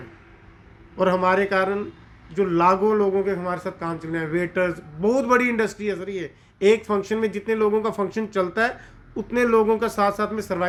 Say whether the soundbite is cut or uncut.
uncut